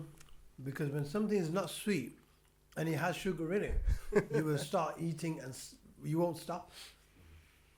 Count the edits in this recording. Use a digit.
0